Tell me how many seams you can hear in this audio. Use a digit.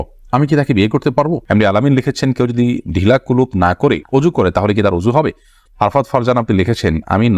2